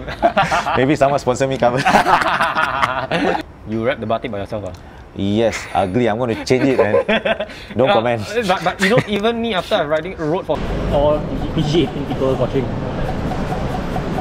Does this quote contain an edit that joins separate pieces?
yes; 2 cuts; at 3.4 s, 10.6 s

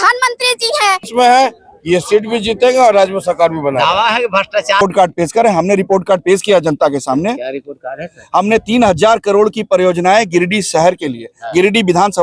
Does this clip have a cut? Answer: yes; 2 cuts; at 1.1 s, 4.8 s

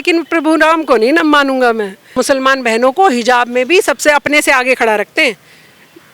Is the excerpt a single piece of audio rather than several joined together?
no; 1 cut; at 2.1 s

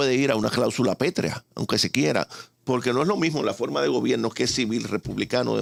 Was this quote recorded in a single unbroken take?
yes; 0 cuts

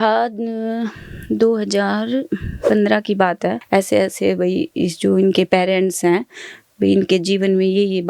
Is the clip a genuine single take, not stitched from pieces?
no; 1 cut; at 3.6 s

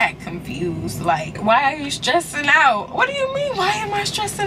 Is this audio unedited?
no; 1 cut; at 1.3 s

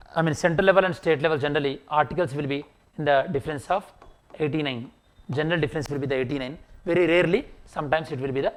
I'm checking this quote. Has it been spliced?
no; 0 cuts

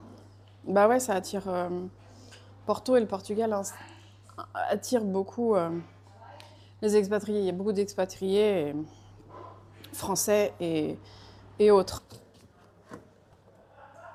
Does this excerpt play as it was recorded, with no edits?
yes; 0 cuts

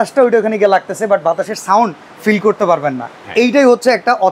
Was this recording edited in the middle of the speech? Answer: no; 0 cuts

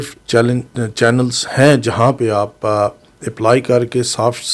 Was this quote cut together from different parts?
no; 0 cuts

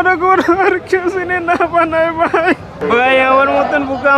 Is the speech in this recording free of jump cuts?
no; 1 cut; at 2.8 s

